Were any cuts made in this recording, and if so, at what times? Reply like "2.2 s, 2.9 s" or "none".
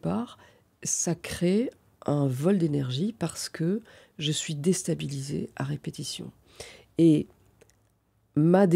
none